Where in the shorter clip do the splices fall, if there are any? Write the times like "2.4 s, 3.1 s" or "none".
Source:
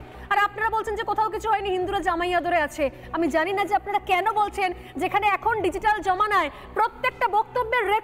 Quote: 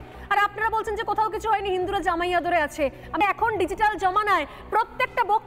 3.2 s